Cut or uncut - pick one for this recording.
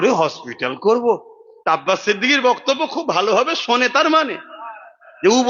uncut